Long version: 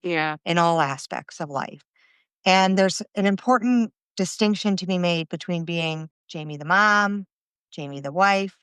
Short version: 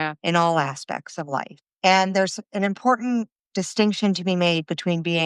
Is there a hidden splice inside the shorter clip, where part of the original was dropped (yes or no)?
yes